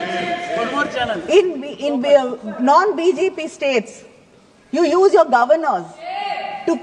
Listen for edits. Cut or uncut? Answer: uncut